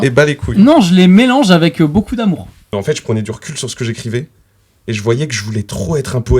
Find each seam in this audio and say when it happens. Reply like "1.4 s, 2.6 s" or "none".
2.6 s

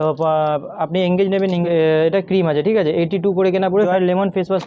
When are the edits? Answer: 1.6 s, 3.9 s

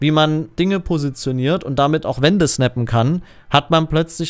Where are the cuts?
none

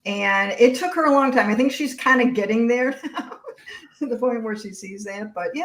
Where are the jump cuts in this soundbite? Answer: none

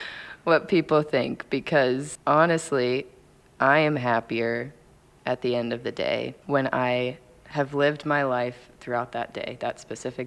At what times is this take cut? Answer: 2.1 s, 6.4 s

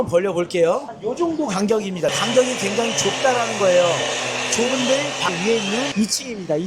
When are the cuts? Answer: 0.9 s, 2.1 s, 5.9 s

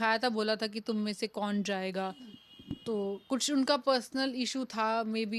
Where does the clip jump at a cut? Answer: none

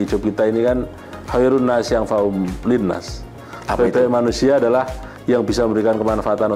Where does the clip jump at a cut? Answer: none

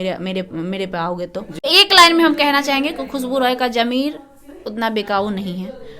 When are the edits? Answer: 1.6 s

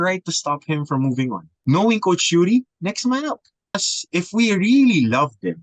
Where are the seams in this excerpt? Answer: 1.5 s, 3.9 s

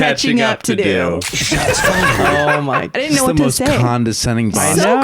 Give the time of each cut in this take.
2.9 s

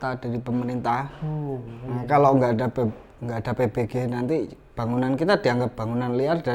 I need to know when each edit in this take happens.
none

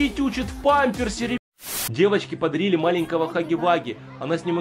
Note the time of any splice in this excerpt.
1.4 s

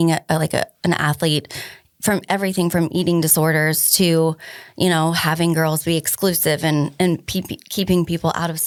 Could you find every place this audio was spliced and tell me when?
none

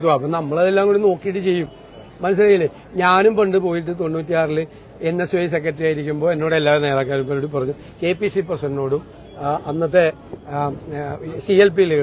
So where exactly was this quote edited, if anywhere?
none

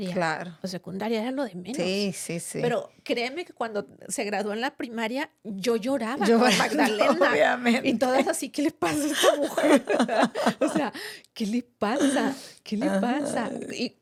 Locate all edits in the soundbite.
none

